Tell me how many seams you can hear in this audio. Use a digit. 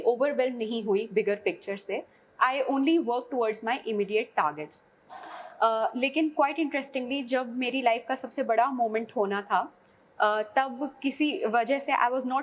0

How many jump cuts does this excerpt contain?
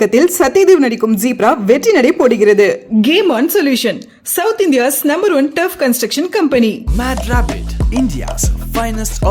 0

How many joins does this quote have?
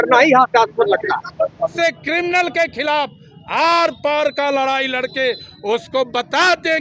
1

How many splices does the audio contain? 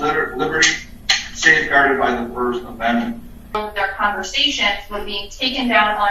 1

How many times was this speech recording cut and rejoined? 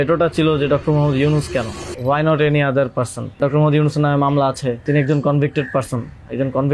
3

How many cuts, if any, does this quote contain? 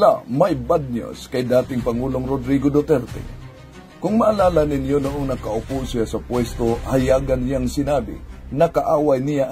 0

